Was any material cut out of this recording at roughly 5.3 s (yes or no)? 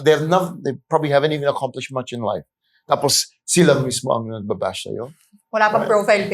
yes